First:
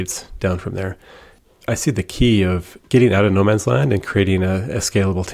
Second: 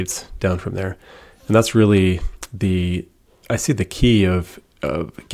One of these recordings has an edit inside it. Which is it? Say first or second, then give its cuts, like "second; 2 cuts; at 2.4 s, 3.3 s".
first; 2 cuts; at 1.3 s, 2.7 s